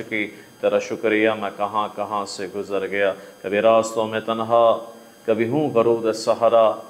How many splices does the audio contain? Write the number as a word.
zero